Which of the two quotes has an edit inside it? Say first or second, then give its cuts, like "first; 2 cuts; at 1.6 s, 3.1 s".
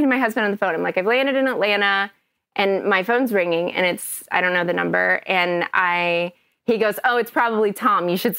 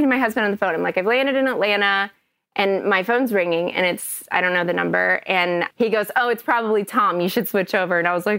second; 1 cut; at 5.7 s